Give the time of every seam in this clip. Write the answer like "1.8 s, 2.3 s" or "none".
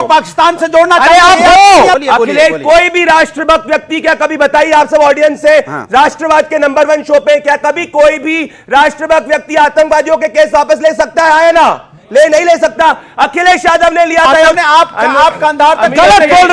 2.0 s, 14.6 s